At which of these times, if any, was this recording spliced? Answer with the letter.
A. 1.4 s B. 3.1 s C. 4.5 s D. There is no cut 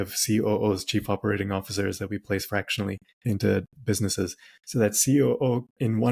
B